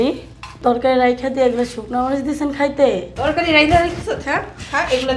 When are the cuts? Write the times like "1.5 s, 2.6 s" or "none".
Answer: 3.1 s